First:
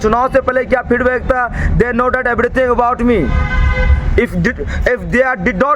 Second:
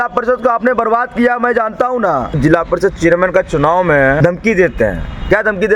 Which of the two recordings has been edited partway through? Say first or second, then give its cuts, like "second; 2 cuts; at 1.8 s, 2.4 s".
second; 2 cuts; at 2.3 s, 4.2 s